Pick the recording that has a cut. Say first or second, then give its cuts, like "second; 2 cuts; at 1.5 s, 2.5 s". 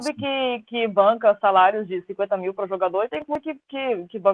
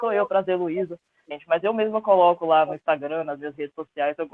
second; 1 cut; at 1.3 s